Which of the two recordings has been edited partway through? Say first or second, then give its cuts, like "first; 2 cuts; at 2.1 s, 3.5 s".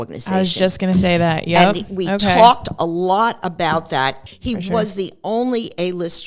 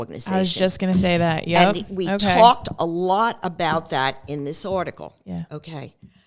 first; 1 cut; at 4.2 s